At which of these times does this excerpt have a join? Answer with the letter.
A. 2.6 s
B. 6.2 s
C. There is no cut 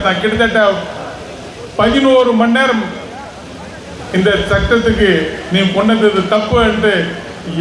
C